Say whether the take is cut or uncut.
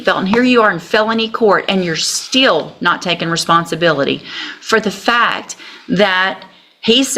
uncut